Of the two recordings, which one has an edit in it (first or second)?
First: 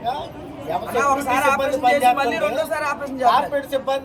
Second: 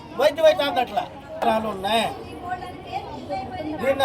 second